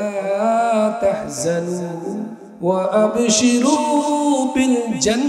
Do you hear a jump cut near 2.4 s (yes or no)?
yes